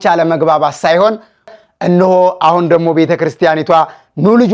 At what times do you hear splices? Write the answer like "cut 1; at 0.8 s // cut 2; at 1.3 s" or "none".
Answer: cut 1; at 1.6 s